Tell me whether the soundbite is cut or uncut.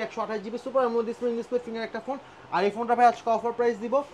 uncut